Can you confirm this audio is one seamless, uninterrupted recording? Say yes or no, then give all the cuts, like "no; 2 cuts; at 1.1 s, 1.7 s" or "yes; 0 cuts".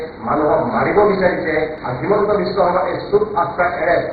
no; 1 cut; at 1.8 s